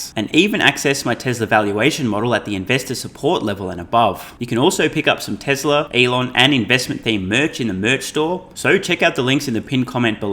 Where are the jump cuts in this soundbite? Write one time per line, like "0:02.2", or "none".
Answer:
0:04.3
0:05.9
0:08.5